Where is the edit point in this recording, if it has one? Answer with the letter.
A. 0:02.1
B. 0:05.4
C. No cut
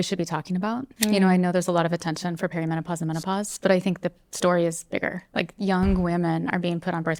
C